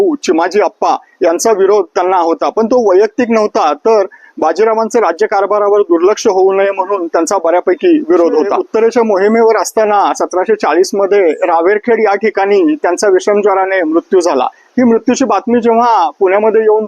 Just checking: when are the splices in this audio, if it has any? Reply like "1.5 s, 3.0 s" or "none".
8.6 s